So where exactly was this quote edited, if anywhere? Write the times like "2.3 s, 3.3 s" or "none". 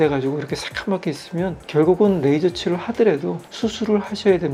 none